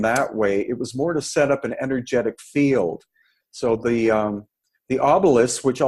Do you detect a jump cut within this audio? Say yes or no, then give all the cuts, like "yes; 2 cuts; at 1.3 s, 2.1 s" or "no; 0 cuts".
no; 0 cuts